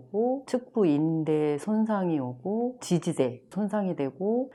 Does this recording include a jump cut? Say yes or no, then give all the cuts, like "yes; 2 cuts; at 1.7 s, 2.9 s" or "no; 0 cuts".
no; 0 cuts